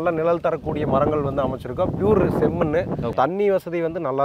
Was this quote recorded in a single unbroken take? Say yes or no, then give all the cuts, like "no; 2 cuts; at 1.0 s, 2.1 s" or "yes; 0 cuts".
no; 1 cut; at 3.1 s